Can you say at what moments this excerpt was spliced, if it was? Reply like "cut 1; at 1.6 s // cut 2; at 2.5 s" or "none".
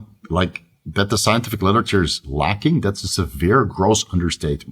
none